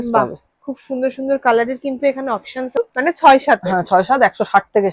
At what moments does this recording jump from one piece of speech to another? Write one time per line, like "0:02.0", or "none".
0:02.9